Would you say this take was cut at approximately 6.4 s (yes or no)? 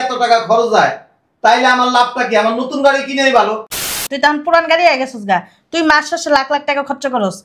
no